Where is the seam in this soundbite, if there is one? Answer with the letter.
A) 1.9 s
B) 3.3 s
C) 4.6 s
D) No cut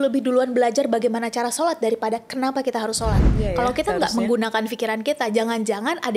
B